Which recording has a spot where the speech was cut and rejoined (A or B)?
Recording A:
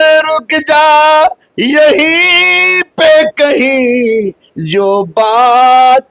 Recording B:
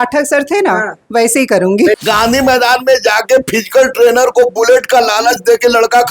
B